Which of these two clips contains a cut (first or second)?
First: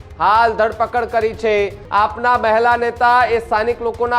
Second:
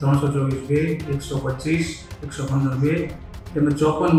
first